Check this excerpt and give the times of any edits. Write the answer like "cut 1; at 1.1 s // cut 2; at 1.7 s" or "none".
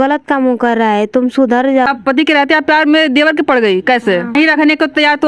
cut 1; at 1.9 s // cut 2; at 4.4 s